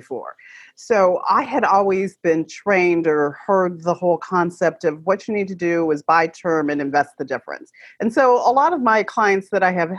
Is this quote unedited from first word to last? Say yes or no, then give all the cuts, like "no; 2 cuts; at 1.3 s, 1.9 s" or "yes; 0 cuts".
yes; 0 cuts